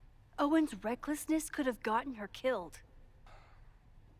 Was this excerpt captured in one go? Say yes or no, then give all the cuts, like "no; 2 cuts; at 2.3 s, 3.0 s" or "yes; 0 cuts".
no; 1 cut; at 3.2 s